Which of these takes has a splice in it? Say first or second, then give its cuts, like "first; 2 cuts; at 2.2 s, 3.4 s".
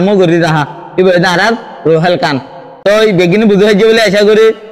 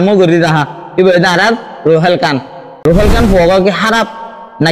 second; 1 cut; at 2.6 s